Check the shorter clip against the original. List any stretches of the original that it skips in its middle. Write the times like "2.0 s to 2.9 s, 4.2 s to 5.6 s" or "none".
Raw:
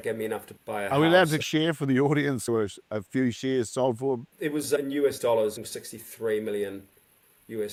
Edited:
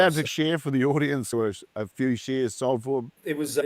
none

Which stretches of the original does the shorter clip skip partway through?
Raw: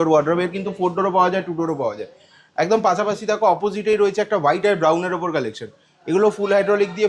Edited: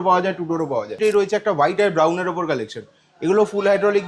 2.0 s to 3.8 s

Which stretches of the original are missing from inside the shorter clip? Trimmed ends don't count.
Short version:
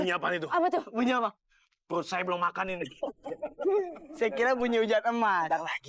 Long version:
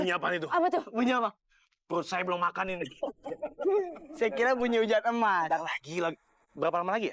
none

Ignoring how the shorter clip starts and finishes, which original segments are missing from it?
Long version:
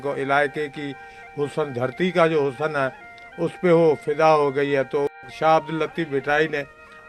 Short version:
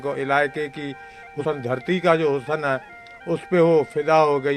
1.4 s to 1.5 s

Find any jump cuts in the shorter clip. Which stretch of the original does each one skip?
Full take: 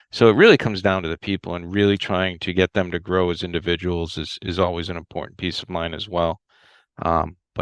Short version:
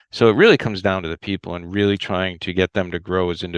none

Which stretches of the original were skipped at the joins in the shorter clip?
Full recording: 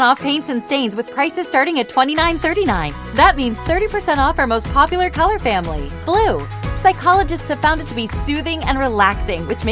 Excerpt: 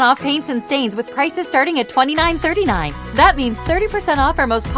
none

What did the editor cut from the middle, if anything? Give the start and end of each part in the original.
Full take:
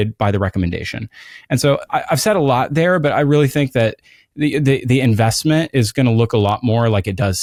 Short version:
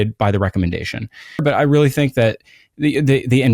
1.4 s to 3.0 s

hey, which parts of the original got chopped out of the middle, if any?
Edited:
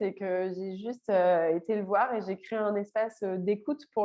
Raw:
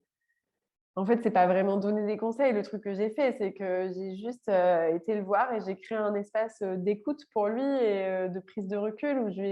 none

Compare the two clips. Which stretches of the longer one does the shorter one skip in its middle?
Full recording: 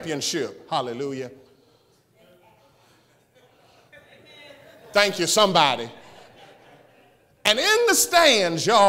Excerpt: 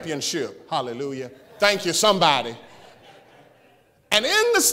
1.4 s to 4.7 s

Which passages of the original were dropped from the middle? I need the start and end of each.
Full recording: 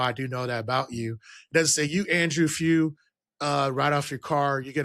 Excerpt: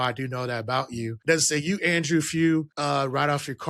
1.2 s to 1.4 s, 3.0 s to 3.4 s

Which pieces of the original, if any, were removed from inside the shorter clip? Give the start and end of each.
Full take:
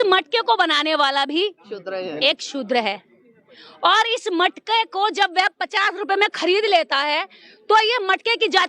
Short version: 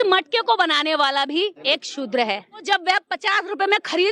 1.6 s to 2.2 s, 3.2 s to 5.1 s

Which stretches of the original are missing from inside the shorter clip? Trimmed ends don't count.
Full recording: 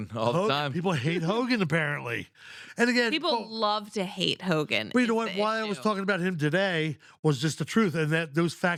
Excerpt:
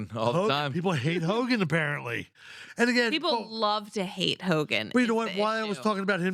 none

